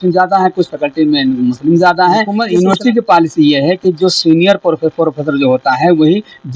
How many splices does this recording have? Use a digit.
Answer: 1